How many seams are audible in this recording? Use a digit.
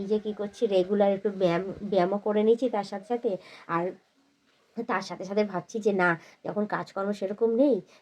0